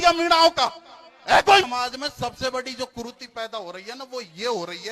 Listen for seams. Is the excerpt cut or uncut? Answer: cut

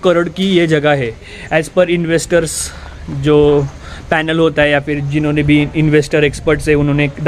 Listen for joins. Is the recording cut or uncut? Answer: uncut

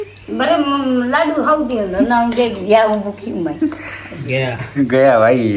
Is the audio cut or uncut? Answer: uncut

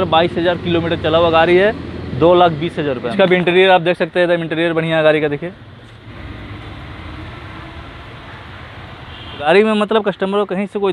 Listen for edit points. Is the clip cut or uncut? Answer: cut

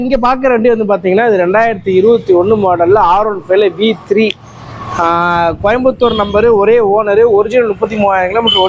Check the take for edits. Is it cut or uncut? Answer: uncut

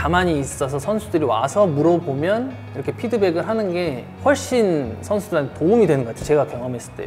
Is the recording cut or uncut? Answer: uncut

